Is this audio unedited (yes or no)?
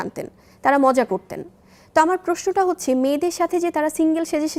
yes